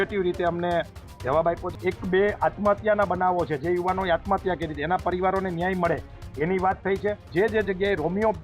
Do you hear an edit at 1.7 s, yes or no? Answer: yes